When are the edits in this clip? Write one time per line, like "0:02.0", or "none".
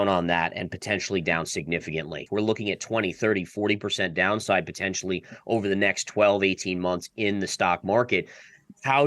0:02.2